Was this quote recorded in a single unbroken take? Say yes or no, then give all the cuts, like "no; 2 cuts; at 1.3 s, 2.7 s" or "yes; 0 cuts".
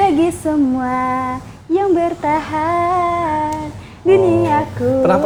yes; 0 cuts